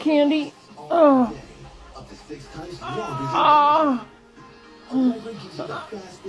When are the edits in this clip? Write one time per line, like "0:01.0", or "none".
none